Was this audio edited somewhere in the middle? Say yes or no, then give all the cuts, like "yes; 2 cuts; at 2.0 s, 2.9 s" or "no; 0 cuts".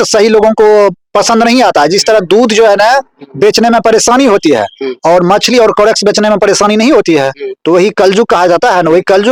no; 0 cuts